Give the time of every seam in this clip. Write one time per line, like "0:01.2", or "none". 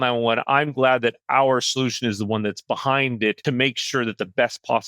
0:03.4